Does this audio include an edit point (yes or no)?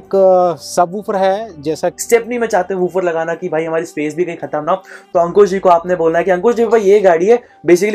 yes